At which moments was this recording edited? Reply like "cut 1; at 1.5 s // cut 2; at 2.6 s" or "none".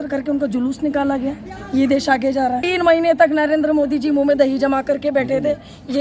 cut 1; at 2.6 s